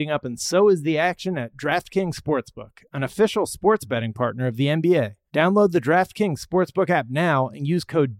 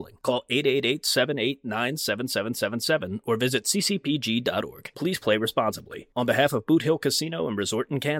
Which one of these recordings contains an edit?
first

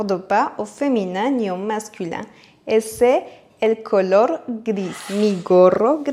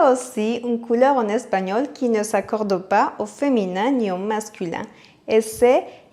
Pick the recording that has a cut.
first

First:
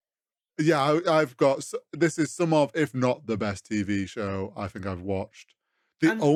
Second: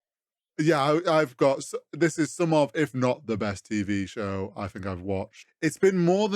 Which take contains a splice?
second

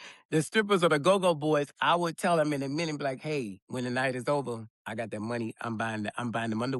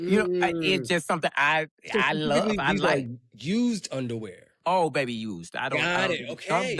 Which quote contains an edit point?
first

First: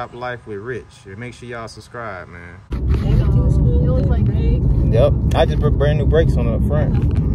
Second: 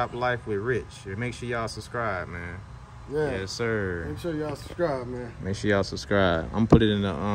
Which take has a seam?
first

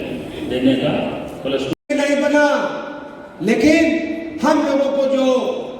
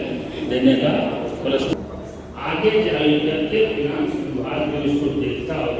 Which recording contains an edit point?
first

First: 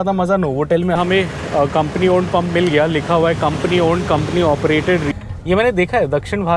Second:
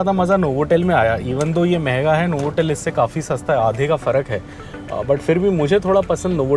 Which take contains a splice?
first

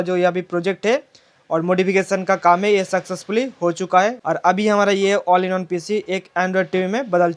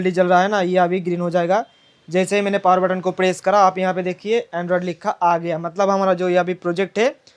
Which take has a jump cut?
first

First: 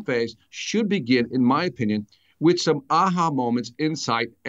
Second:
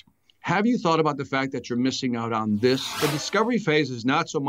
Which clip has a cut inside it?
second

